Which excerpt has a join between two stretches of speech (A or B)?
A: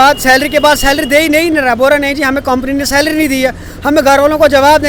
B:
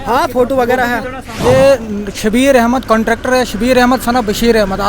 B